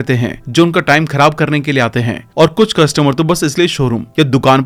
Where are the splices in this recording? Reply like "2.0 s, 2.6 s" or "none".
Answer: none

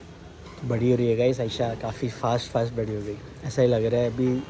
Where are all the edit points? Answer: none

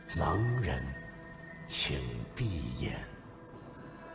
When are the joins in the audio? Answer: 3.1 s

